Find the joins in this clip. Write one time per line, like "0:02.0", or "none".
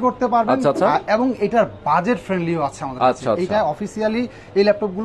none